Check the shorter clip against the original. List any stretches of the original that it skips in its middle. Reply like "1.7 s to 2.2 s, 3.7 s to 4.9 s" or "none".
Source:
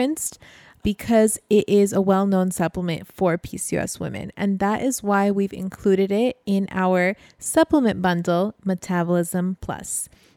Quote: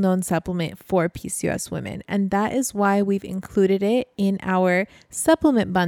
none